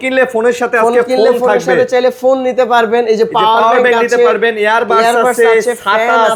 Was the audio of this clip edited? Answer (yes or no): no